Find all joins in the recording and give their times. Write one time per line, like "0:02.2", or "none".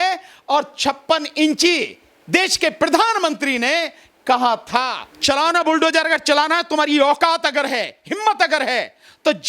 0:05.0